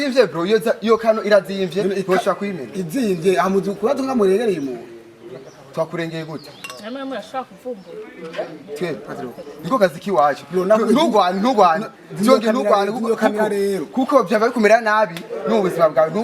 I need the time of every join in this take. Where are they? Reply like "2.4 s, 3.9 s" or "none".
none